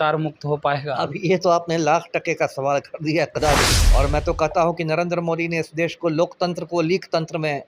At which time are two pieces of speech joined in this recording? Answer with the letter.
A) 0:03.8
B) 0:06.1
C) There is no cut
A